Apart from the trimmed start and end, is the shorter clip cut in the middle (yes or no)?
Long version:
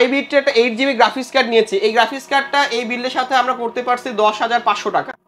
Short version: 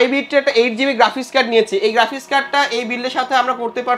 no